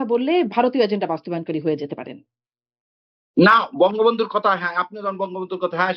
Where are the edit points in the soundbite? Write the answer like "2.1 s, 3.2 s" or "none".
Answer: none